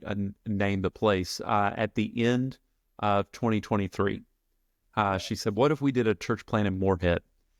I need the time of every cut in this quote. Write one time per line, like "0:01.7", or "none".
none